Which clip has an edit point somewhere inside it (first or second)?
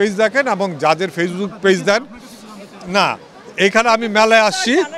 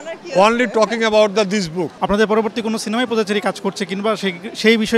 second